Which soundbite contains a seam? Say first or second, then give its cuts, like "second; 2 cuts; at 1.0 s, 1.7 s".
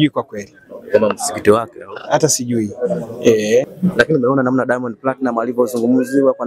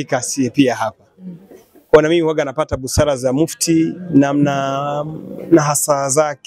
first; 1 cut; at 3.7 s